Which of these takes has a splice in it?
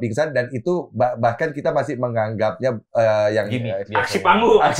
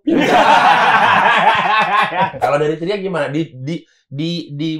second; 1 cut; at 2.4 s

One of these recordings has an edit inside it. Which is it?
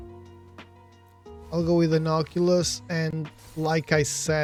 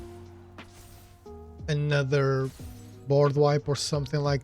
second; 1 cut; at 1.5 s

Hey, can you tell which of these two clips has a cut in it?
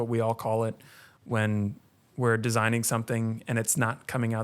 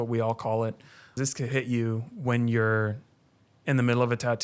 second; 1 cut; at 1.2 s

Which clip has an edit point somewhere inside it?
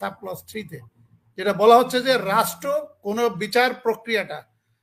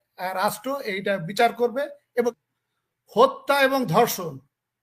second; 1 cut; at 2.3 s

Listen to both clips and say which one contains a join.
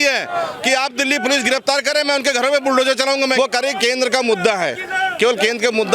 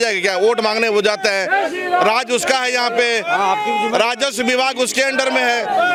first; 1 cut; at 3.3 s

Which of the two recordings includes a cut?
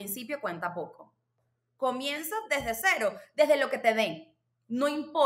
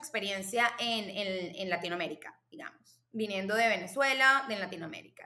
first; 1 cut; at 1.4 s

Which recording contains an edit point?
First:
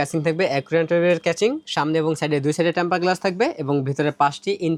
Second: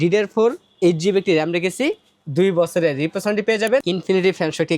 second; 1 cut; at 3.8 s

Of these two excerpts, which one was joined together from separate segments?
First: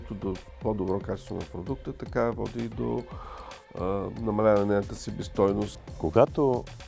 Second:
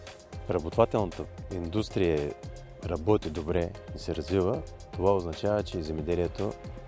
first; 1 cut; at 5.8 s

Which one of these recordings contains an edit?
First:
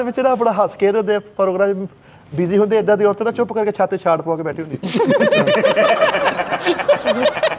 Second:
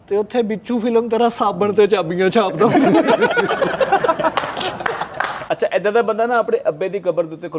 second; 1 cut; at 5.3 s

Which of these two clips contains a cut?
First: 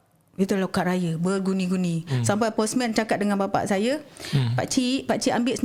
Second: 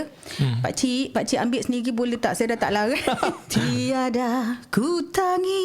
second; 1 cut; at 3.4 s

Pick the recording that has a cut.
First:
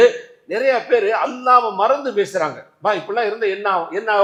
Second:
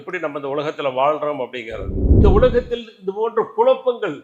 second; 1 cut; at 2.0 s

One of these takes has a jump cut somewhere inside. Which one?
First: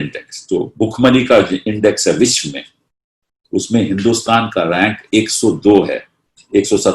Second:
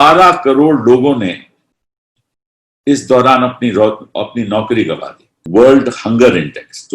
second; 1 cut; at 5.3 s

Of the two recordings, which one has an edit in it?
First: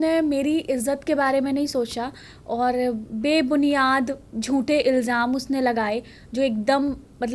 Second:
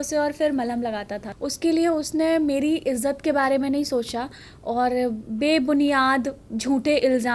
second; 1 cut; at 1.2 s

